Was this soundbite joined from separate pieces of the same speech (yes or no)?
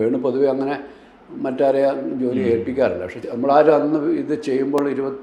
yes